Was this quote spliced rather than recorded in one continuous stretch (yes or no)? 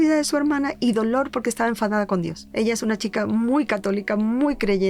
no